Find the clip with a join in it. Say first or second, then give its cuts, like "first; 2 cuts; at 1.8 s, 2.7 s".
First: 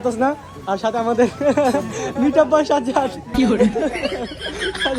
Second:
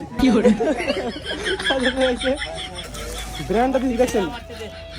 second; 1 cut; at 2.8 s